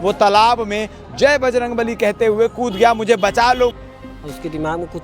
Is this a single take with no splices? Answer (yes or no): no